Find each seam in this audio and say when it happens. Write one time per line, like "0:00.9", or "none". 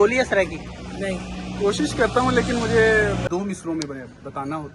0:03.2

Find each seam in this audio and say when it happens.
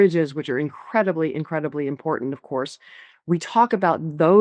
none

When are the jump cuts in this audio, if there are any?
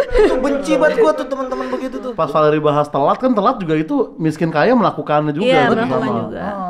0:02.1

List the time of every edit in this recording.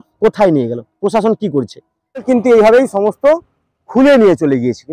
0:02.2

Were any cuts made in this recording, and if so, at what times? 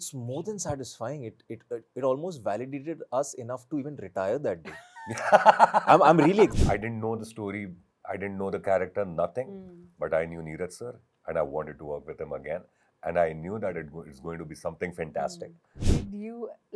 0:06.5
0:15.7

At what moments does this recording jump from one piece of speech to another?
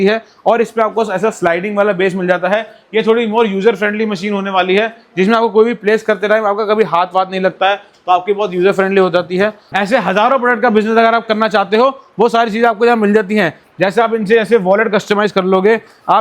0:09.6

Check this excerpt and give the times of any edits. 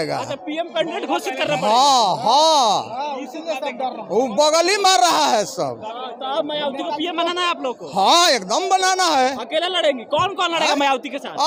none

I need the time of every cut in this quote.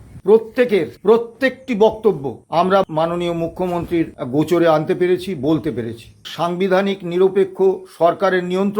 0:00.9
0:02.9
0:04.2
0:06.2

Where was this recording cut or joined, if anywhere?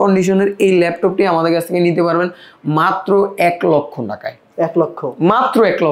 none

